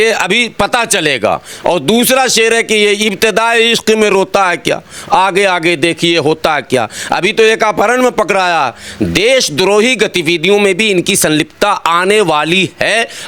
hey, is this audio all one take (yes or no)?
yes